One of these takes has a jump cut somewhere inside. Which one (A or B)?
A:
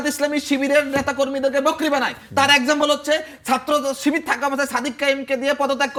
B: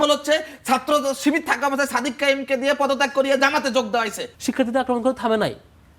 B